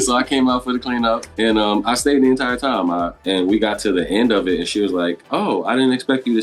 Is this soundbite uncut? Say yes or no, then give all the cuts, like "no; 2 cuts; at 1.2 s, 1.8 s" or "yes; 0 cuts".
no; 1 cut; at 3.1 s